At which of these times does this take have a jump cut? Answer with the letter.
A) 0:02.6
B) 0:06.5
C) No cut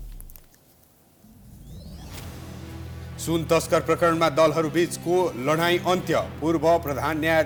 C